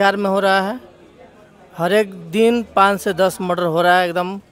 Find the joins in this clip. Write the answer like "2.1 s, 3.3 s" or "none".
none